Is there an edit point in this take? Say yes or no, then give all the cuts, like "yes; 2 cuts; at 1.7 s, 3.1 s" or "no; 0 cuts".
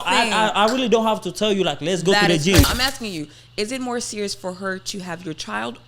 yes; 1 cut; at 2.7 s